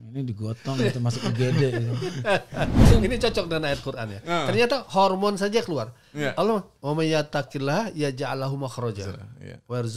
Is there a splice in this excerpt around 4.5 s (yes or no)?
no